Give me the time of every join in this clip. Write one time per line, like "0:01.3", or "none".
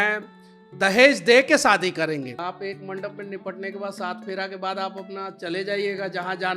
0:02.4